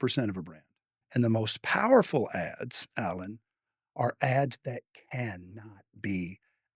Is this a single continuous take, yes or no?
no